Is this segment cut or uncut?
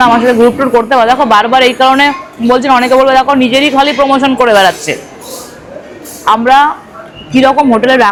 uncut